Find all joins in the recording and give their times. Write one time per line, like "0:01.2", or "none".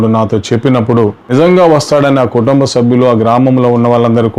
0:01.2